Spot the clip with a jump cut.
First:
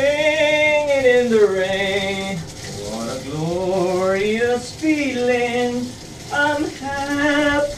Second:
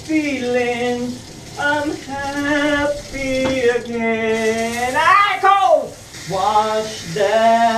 second; 1 cut; at 6.1 s

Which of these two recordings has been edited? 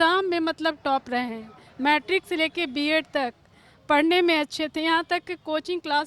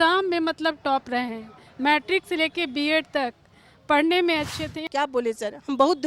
second; 1 cut; at 4.8 s

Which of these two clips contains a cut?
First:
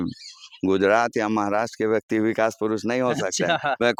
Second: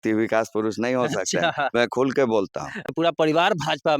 second; 1 cut; at 2.8 s

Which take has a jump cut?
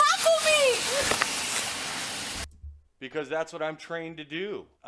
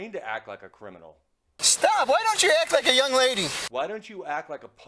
second; 1 cut; at 1.6 s

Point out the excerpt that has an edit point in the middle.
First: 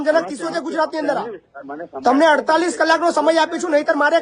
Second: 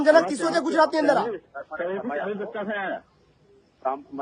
first; 1 cut; at 1.6 s

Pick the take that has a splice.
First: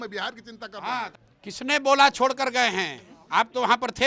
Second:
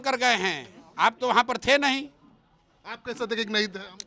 first; 1 cut; at 1.1 s

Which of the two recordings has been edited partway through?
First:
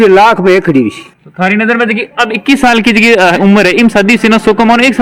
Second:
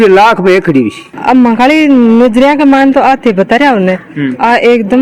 second; 1 cut; at 1.1 s

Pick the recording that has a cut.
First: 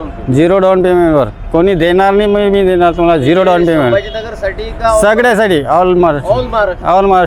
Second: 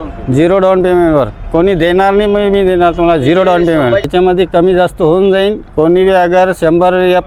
second; 1 cut; at 4.1 s

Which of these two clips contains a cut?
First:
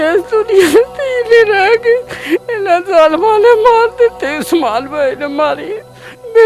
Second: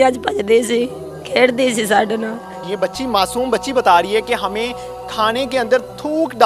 second; 1 cut; at 2.6 s

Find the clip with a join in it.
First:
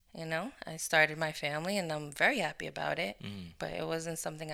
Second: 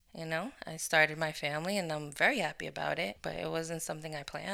second; 1 cut; at 3.2 s

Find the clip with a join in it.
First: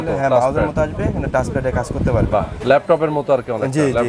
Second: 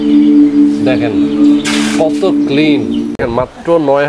second; 1 cut; at 3.2 s

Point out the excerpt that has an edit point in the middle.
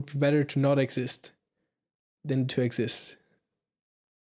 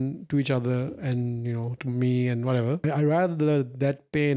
second; 1 cut; at 2.8 s

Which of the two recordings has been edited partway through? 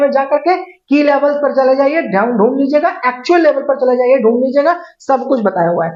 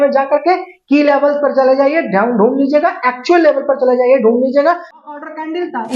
second; 1 cut; at 4.9 s

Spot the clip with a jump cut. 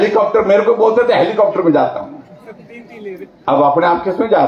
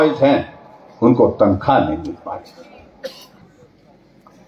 second; 1 cut; at 3.4 s

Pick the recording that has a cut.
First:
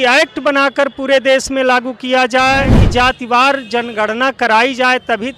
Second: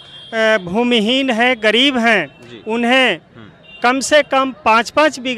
first; 1 cut; at 2.8 s

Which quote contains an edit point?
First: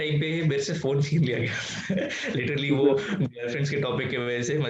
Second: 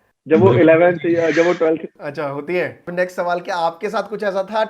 second; 1 cut; at 2.9 s

